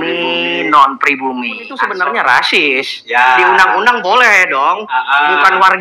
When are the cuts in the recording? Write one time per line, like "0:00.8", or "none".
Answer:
0:01.7